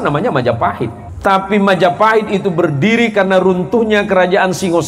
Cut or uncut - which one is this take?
cut